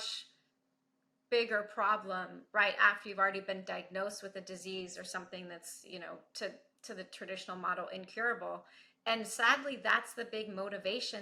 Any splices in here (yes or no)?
no